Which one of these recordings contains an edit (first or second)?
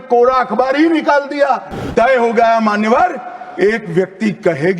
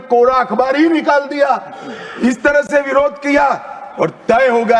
first